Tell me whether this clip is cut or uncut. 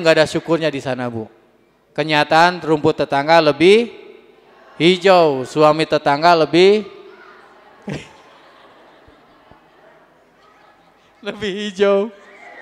uncut